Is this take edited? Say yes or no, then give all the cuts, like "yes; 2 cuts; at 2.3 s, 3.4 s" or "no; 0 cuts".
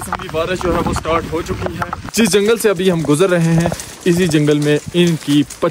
yes; 1 cut; at 2.1 s